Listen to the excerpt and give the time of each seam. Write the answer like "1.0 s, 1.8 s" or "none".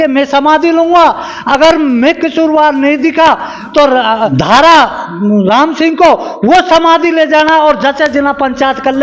4.3 s

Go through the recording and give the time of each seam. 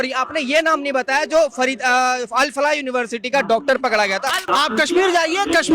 4.4 s

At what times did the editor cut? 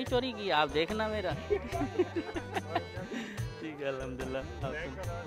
none

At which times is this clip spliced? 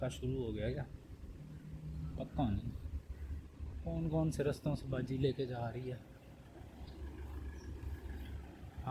none

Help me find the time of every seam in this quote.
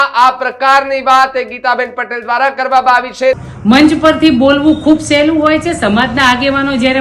3.5 s

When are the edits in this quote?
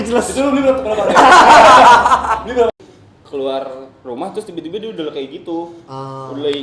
2.7 s

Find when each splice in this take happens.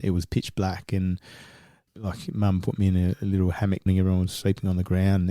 1.8 s, 3.9 s

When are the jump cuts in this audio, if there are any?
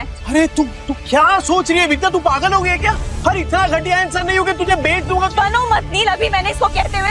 3.1 s

